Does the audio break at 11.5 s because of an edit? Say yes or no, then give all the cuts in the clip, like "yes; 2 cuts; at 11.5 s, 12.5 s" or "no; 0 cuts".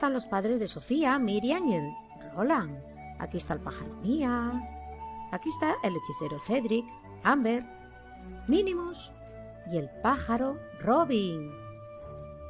yes; 1 cut; at 11.5 s